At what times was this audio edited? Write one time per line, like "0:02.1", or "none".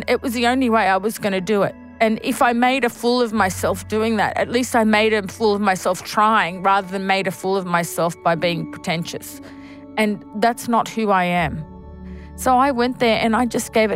0:11.9